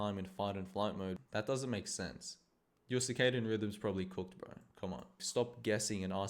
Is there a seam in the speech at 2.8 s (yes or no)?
no